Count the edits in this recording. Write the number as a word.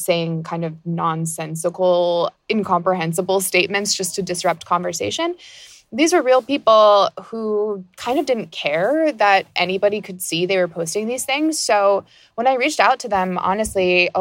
one